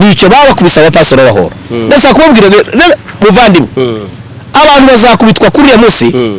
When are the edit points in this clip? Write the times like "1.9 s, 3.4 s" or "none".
none